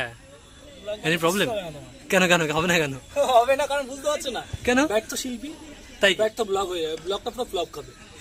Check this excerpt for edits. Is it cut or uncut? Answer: uncut